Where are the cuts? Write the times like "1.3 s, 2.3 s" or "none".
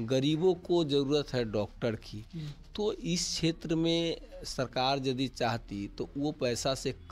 none